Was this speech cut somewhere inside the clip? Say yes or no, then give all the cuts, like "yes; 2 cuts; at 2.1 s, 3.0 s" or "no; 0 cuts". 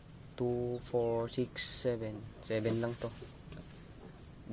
no; 0 cuts